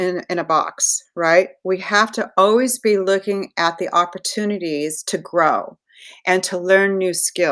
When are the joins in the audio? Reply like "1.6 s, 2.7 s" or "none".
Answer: none